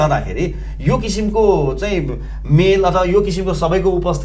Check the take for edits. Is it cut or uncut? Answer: uncut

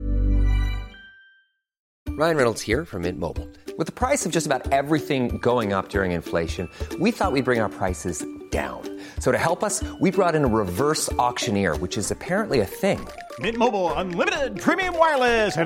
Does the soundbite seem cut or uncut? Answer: cut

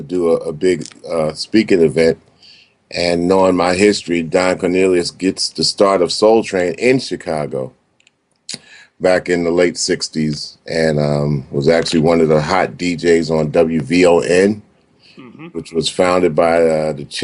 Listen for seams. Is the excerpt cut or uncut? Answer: uncut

